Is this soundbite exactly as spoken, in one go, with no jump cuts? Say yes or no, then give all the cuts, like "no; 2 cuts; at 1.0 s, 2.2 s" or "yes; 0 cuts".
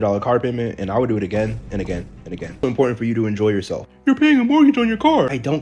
no; 1 cut; at 2.6 s